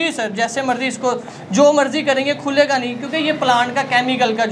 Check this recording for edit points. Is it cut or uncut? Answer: uncut